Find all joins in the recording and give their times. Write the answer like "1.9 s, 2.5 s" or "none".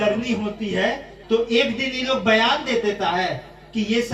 1.1 s